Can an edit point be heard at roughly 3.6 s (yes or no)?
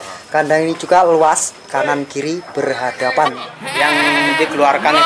yes